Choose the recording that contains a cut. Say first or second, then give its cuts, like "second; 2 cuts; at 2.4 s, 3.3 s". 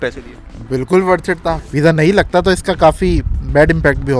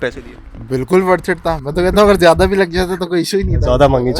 first; 1 cut; at 1.6 s